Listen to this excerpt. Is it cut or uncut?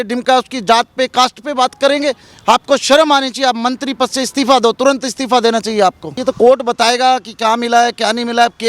cut